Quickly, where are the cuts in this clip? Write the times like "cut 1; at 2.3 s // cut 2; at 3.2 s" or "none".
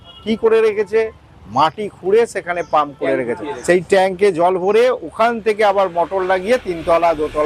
cut 1; at 3.5 s